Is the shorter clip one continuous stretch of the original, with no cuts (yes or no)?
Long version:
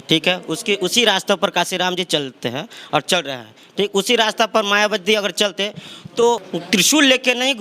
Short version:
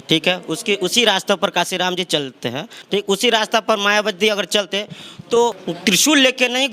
no